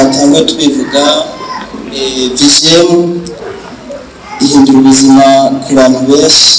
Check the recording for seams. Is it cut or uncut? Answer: uncut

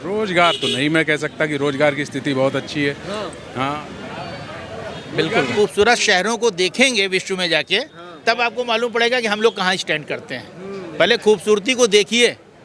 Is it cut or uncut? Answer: cut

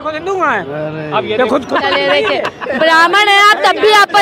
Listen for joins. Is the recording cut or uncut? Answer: uncut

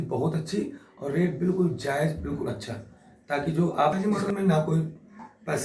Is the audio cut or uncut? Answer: uncut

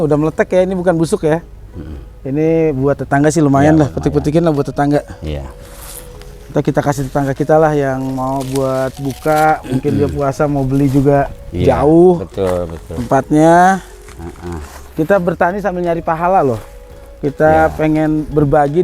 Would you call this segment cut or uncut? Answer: uncut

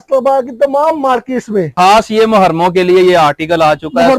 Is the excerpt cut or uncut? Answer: cut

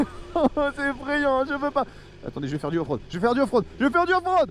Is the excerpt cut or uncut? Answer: uncut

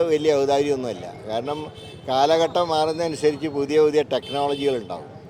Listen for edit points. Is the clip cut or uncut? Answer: uncut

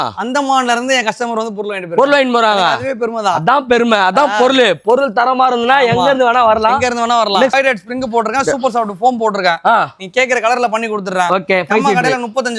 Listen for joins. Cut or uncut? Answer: cut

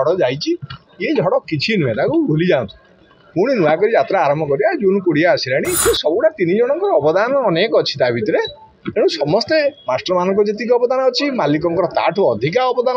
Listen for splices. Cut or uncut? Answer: cut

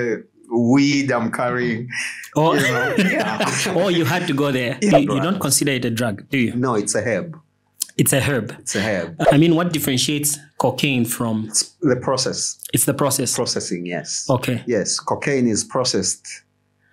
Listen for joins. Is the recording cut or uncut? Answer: cut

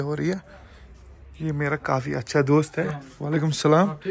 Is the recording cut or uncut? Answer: uncut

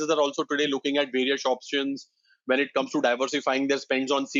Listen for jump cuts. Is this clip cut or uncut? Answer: uncut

